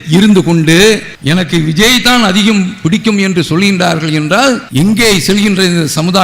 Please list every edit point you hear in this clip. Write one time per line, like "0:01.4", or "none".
0:01.1
0:04.7